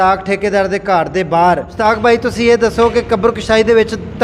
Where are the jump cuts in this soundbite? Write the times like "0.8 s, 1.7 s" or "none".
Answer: 1.8 s